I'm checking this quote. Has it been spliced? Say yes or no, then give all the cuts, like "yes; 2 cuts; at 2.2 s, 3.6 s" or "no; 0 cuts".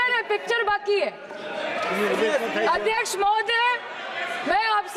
no; 0 cuts